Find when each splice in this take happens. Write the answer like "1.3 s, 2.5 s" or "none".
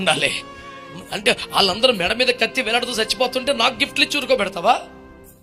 none